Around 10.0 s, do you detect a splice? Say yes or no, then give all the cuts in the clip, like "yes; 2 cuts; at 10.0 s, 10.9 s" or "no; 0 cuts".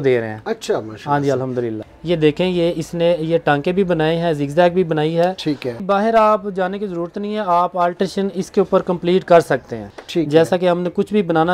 yes; 3 cuts; at 1.7 s, 5.8 s, 10.0 s